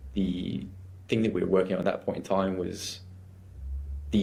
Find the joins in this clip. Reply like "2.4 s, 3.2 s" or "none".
none